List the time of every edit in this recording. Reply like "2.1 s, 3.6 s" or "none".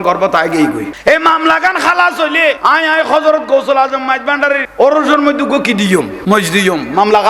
0.9 s, 2.6 s, 4.7 s, 6.1 s